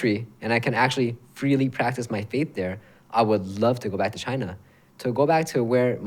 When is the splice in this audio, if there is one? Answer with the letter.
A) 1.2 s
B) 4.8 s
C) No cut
C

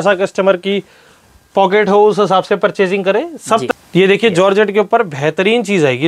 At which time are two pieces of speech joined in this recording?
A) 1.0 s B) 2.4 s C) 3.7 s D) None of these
C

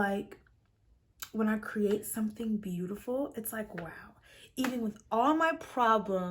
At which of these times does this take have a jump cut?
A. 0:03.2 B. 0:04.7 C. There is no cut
C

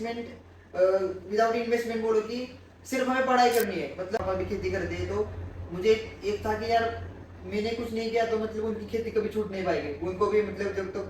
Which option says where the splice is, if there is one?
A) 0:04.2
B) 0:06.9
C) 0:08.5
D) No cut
A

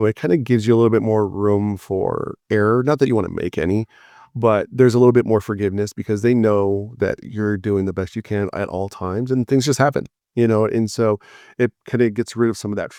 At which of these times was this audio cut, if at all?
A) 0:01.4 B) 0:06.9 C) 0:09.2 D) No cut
D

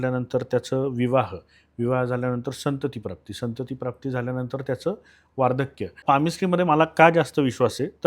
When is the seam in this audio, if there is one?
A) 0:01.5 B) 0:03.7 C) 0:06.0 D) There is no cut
C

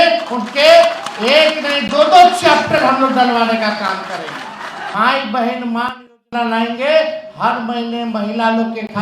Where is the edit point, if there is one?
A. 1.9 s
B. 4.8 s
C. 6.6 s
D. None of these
B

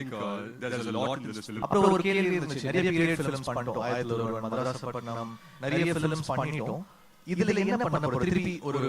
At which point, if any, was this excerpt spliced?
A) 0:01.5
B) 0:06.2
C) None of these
A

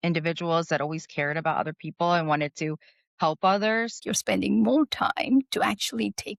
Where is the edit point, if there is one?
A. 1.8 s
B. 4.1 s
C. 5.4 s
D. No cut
B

